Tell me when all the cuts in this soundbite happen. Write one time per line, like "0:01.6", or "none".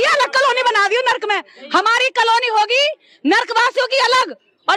none